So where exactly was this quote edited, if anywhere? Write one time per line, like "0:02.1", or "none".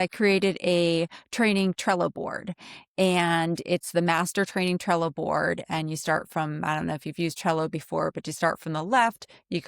none